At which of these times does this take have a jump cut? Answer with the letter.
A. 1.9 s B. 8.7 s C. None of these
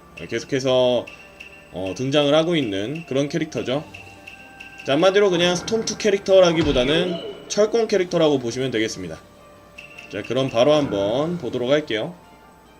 B